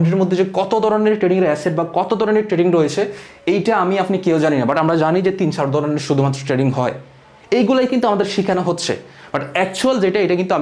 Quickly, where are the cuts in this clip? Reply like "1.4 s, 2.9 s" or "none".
none